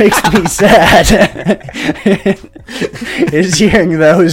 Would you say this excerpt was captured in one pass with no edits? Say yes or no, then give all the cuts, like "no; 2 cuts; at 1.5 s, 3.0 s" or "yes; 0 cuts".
yes; 0 cuts